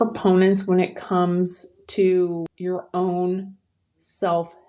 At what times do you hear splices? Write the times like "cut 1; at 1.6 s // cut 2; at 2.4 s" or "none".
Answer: cut 1; at 2.5 s